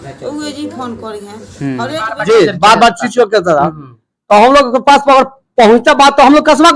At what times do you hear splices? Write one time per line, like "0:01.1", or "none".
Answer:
0:02.1